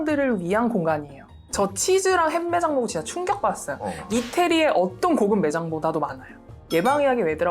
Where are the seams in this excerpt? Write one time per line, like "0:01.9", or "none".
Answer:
0:01.4
0:06.5